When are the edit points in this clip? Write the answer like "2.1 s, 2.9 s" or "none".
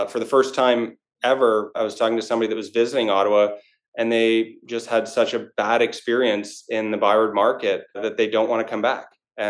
1.8 s, 8.1 s